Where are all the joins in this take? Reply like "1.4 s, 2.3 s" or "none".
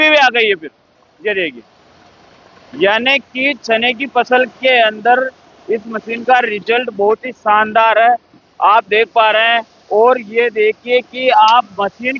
none